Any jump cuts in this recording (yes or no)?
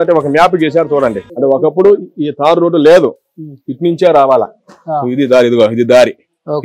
yes